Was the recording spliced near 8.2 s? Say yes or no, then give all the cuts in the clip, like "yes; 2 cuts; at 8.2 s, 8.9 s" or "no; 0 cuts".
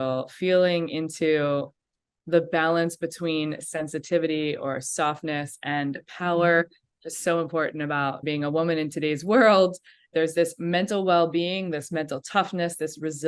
yes; 2 cuts; at 8.2 s, 10.1 s